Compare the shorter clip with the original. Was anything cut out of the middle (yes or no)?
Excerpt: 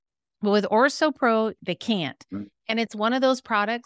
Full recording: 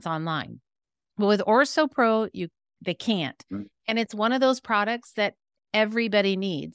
yes